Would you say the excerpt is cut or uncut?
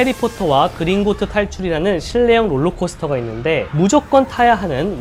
uncut